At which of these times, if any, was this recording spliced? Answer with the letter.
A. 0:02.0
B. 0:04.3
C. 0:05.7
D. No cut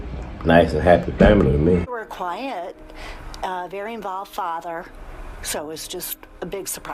A